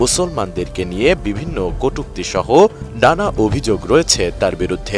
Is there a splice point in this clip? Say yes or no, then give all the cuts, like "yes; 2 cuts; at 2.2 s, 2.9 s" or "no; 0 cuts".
no; 0 cuts